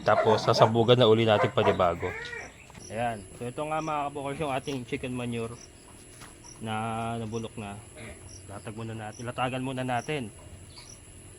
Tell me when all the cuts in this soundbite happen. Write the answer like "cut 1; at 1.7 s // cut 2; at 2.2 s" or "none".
cut 1; at 2.2 s